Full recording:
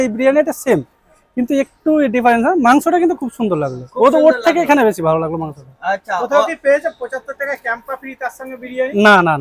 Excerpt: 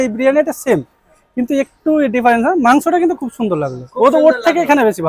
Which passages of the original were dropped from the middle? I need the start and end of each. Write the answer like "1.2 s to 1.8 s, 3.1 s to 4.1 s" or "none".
none